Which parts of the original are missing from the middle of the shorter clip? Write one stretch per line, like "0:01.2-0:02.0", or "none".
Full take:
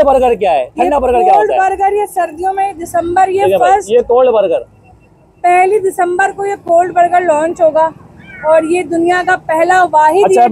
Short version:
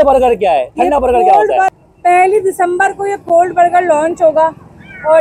0:01.7-0:05.1